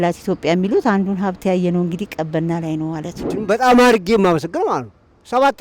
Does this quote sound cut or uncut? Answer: cut